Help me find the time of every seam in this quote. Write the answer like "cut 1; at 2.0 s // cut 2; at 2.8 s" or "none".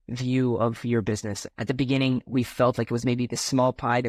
cut 1; at 1.3 s

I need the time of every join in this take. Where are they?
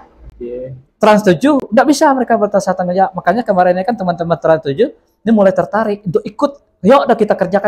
none

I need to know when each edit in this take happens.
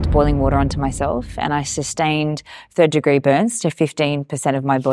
none

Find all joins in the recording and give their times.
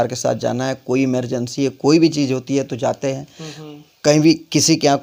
none

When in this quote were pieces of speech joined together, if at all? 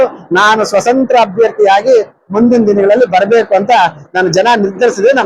none

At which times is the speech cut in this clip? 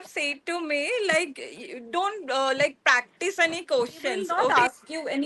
cut 1; at 4.3 s

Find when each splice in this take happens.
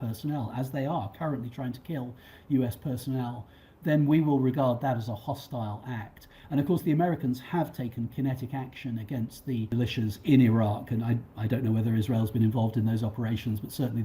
cut 1; at 9.7 s

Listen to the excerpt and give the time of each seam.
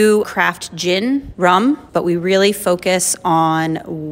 cut 1; at 1.5 s

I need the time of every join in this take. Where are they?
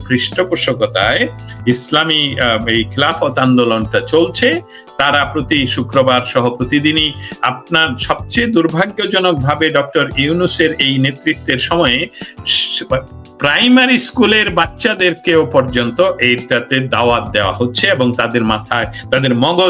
none

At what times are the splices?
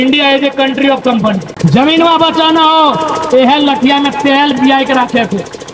cut 1; at 1.5 s

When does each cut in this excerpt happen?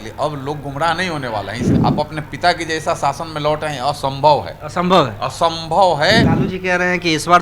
cut 1; at 1.7 s // cut 2; at 6.3 s

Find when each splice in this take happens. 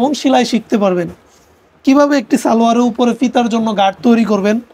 none

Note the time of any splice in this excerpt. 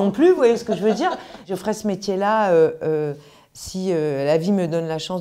cut 1; at 1.5 s

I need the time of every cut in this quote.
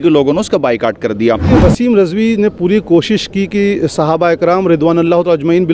cut 1; at 1.5 s

